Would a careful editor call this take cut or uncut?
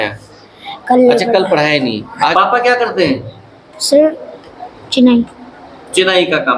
cut